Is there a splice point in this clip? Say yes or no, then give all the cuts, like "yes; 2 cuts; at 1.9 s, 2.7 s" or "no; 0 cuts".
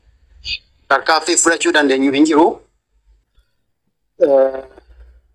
no; 0 cuts